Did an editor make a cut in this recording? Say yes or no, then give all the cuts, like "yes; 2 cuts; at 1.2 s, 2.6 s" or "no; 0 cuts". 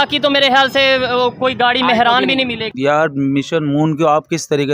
yes; 1 cut; at 2.6 s